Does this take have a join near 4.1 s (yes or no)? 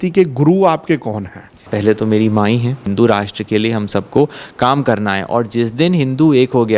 no